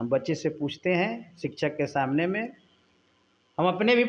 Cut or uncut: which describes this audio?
uncut